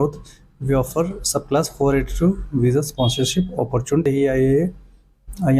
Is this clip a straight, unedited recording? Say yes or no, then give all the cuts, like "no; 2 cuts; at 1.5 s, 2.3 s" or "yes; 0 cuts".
no; 1 cut; at 4.0 s